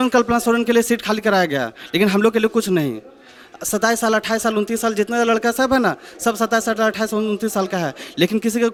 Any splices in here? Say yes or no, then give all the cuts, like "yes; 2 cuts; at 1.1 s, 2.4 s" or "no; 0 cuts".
no; 0 cuts